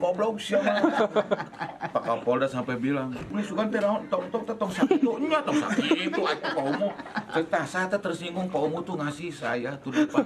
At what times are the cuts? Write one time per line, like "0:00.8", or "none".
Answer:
0:03.3